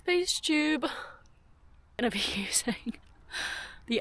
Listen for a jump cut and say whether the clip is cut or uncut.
cut